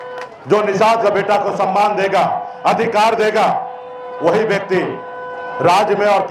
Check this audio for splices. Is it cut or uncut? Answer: uncut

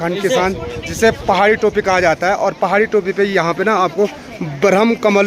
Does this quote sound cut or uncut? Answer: uncut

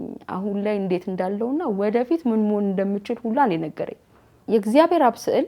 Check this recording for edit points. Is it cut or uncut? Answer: cut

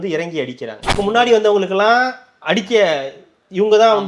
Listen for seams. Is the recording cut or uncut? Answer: cut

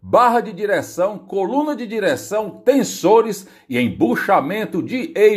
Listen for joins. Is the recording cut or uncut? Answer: uncut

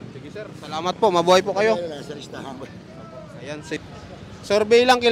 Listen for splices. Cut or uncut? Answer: cut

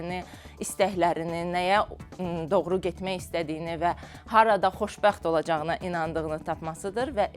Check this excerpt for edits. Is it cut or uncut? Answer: uncut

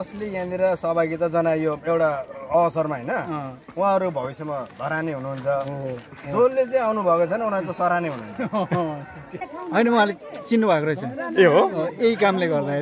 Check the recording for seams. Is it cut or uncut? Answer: cut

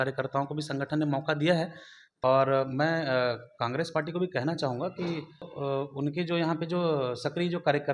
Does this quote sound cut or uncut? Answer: cut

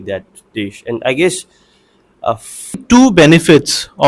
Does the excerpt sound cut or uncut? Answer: cut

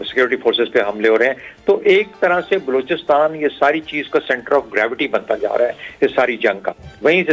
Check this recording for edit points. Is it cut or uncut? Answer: uncut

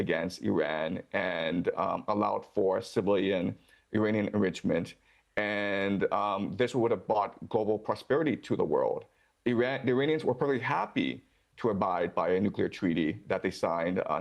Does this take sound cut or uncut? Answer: uncut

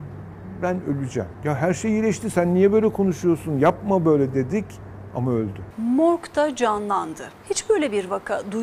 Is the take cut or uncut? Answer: cut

